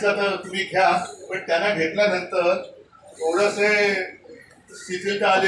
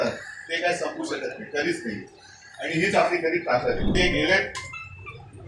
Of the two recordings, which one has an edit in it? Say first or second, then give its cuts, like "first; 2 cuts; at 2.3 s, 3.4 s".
second; 1 cut; at 3.9 s